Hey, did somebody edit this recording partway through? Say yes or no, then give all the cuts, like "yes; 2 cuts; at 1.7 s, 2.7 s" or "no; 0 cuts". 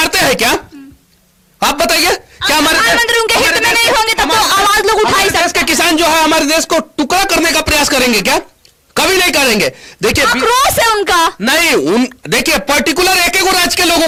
no; 0 cuts